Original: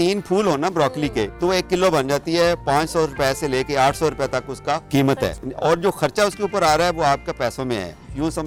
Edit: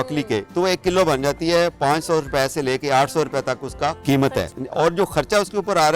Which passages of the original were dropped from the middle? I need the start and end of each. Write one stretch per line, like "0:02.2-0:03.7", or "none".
none

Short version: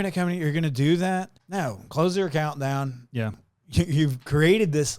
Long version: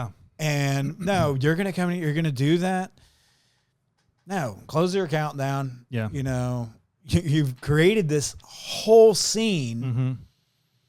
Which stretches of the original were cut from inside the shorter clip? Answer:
0:03.0-0:04.2
0:06.1-0:06.7

